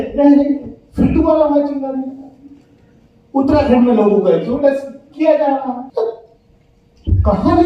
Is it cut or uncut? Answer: cut